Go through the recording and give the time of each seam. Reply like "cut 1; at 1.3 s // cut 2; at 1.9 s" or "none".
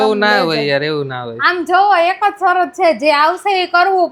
none